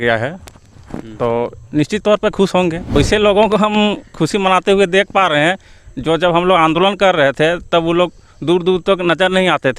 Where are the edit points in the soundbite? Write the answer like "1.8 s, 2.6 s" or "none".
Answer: 2.9 s